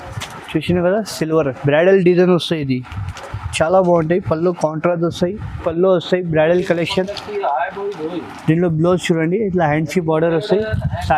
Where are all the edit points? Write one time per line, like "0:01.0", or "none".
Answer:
0:05.6